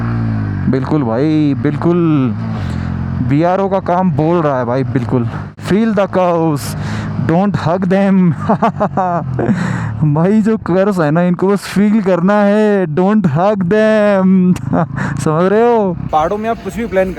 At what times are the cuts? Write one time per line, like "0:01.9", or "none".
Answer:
0:16.0